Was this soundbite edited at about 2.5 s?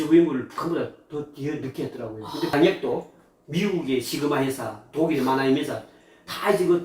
yes; 1 cut; at 2.5 s

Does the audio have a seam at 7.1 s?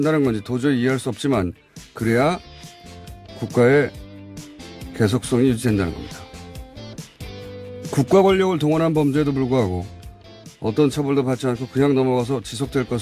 yes; 1 cut; at 7.1 s

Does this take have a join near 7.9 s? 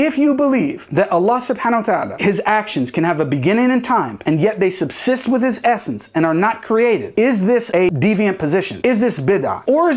yes; 1 cut; at 7.9 s

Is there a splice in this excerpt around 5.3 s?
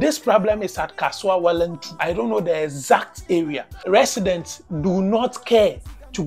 no; 2 cuts; at 1.9 s, 3.8 s

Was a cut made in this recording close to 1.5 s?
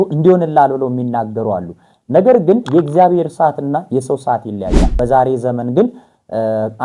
no; 1 cut; at 4.9 s

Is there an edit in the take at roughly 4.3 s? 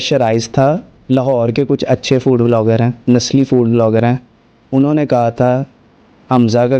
no; 2 cuts; at 0.9 s, 3.0 s

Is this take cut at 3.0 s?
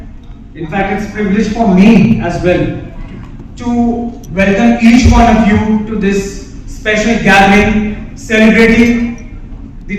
no; 0 cuts

